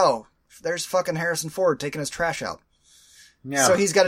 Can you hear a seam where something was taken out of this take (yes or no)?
no